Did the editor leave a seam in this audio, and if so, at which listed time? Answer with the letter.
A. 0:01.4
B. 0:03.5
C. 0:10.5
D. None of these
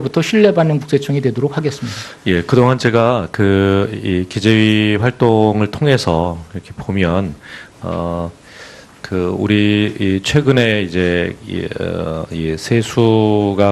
B